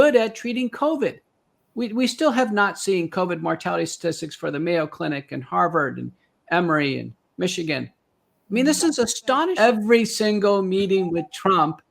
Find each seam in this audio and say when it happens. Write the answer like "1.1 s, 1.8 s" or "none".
9.5 s

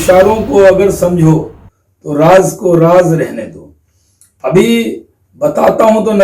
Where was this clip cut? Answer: none

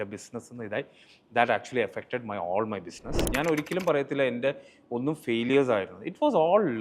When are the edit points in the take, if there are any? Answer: 3.2 s

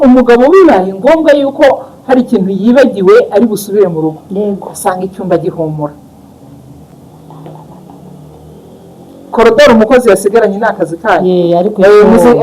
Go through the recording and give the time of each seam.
none

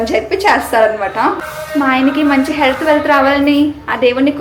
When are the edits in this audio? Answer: 1.4 s

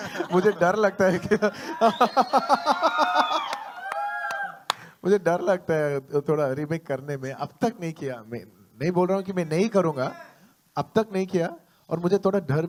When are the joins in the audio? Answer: none

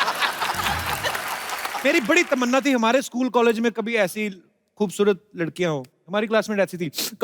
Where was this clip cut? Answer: 1.8 s, 6.0 s

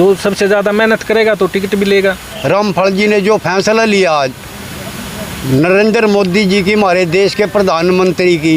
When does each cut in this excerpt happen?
2.3 s

